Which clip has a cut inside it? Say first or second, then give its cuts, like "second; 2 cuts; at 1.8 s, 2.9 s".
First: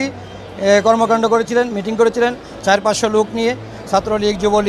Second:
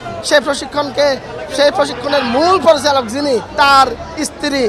second; 1 cut; at 3.5 s